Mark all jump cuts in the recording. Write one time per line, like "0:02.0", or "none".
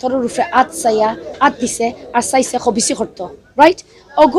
none